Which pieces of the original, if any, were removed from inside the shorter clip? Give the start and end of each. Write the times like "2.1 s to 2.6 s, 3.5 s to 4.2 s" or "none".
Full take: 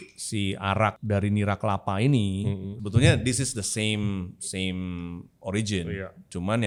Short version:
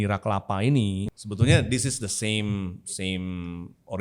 2.6 s to 2.7 s

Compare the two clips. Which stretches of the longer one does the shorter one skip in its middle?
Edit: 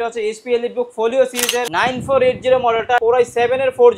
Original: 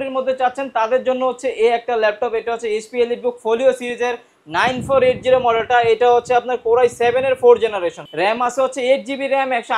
4.2 s to 4.5 s, 5.8 s to 6.6 s

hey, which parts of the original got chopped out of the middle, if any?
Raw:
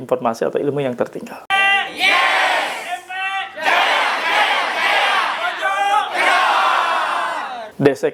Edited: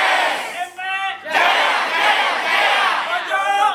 none

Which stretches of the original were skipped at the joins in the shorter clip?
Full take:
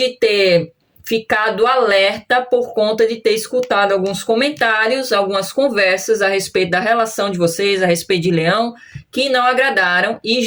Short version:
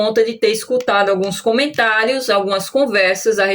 none

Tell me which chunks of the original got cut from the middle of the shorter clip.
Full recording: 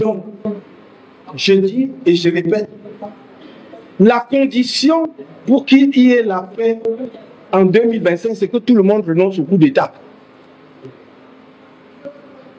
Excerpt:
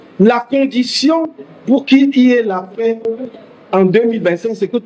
none

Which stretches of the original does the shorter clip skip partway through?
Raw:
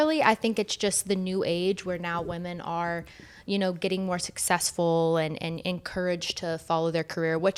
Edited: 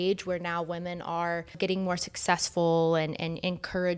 3.1 s to 3.8 s

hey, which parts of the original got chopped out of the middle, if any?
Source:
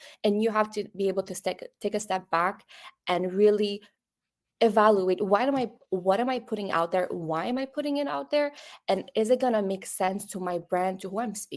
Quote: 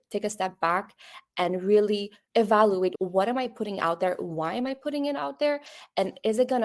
3.9 s to 4.4 s, 5.2 s to 5.9 s

